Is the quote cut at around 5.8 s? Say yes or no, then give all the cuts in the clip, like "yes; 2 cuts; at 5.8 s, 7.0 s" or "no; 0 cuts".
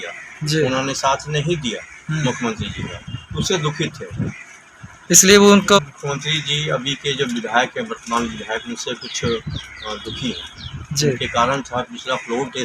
yes; 1 cut; at 5.8 s